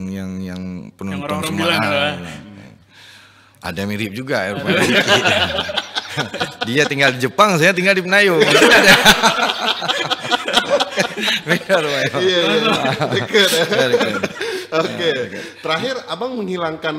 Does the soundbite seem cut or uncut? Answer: uncut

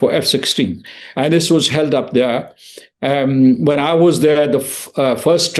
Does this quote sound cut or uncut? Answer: uncut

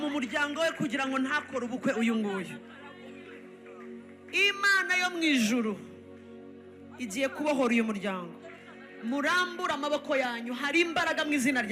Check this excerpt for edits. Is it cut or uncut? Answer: uncut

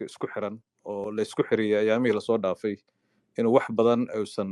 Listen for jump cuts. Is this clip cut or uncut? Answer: uncut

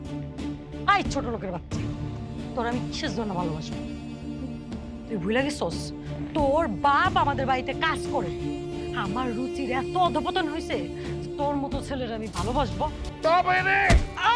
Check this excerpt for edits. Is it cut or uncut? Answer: cut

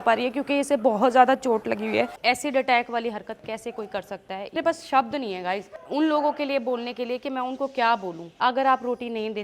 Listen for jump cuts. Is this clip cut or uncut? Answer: cut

